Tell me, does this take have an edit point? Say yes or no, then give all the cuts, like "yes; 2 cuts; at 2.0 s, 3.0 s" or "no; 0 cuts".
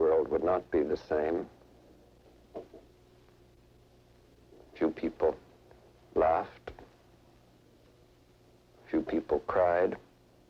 no; 0 cuts